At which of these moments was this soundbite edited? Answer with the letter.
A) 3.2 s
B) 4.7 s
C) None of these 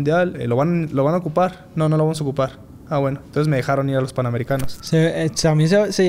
B